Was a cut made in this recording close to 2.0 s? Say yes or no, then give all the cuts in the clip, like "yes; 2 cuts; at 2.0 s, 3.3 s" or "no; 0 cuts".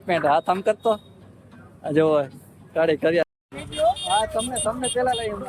no; 1 cut; at 3.2 s